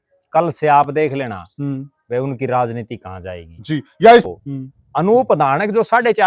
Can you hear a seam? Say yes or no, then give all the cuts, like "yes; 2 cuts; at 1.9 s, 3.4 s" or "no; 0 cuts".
yes; 1 cut; at 4.3 s